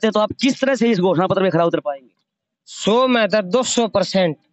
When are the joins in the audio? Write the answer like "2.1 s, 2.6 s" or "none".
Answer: none